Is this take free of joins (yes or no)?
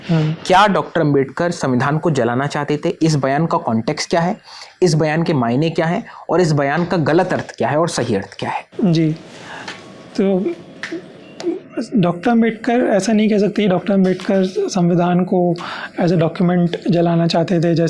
yes